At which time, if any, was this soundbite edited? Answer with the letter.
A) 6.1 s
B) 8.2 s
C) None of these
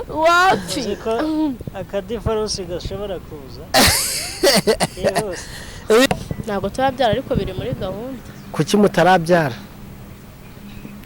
A